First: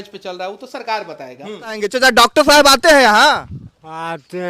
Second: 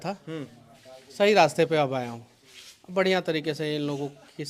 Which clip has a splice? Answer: first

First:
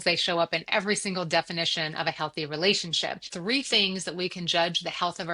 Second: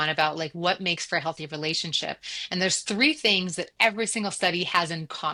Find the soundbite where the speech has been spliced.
first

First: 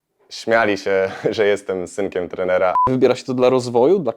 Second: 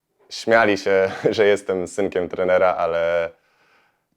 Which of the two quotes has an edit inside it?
first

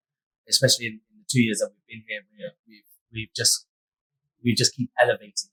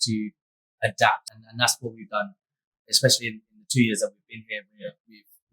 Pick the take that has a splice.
second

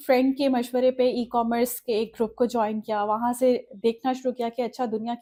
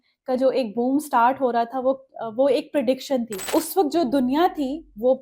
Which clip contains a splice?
second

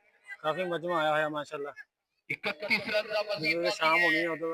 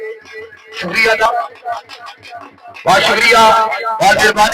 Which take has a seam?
second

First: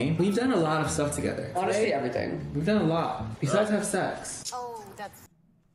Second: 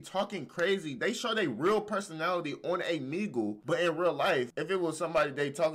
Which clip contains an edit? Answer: second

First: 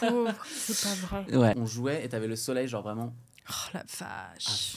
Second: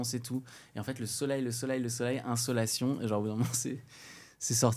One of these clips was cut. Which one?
first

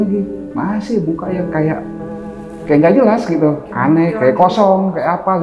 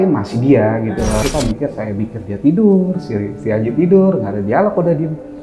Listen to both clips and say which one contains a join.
second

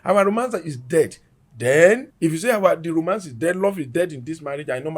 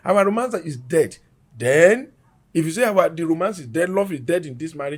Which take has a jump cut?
first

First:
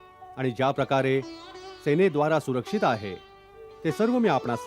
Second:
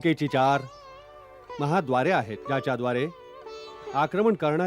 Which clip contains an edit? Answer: second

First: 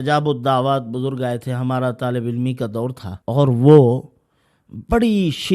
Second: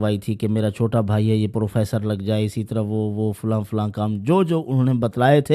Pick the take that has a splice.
first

